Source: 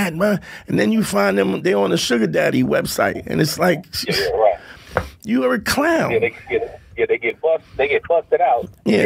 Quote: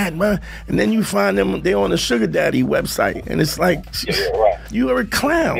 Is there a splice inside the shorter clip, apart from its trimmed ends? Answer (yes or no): yes